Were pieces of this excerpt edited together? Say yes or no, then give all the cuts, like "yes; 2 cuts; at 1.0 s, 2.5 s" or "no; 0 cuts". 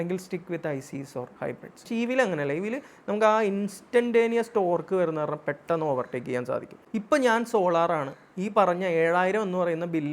yes; 2 cuts; at 1.8 s, 6.8 s